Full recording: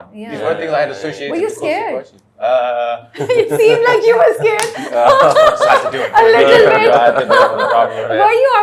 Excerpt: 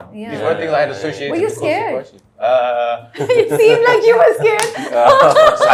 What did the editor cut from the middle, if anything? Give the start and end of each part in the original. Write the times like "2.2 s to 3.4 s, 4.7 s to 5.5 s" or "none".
none